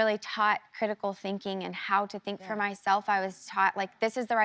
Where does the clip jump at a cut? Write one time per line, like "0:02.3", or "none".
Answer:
none